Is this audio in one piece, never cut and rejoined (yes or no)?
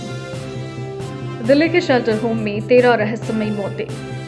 yes